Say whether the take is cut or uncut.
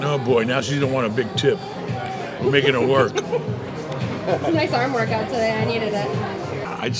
uncut